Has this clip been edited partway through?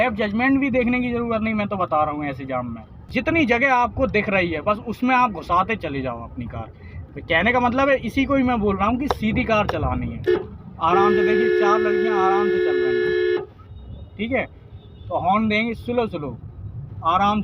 yes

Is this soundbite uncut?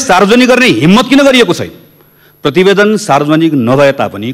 yes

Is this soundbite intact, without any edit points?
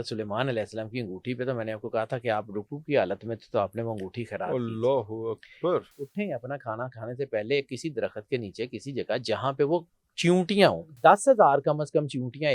no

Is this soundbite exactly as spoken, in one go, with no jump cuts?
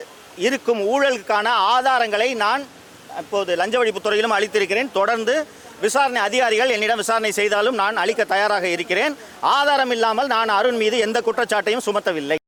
yes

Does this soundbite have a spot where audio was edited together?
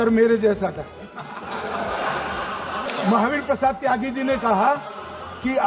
yes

